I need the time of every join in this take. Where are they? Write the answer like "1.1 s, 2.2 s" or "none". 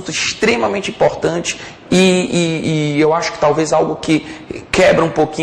3.3 s